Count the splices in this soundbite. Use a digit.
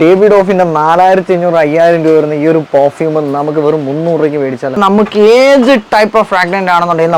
1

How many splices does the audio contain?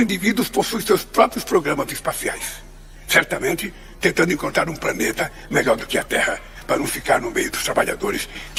0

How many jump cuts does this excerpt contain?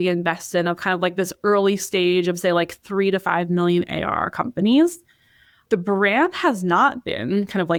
0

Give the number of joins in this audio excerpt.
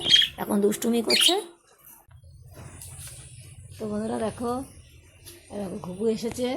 1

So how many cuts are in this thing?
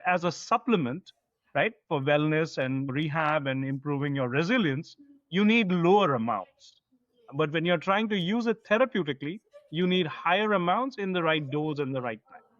1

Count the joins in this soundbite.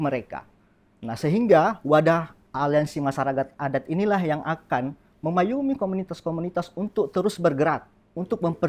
1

